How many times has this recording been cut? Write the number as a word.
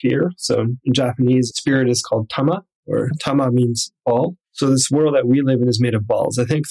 two